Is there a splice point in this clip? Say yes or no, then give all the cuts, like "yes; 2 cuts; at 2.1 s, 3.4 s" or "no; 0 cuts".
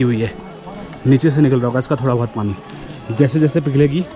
no; 0 cuts